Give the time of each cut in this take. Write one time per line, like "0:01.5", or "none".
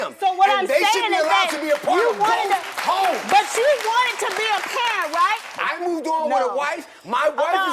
0:05.6